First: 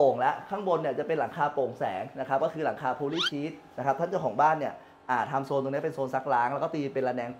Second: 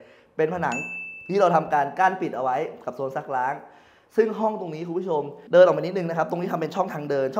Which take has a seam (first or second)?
second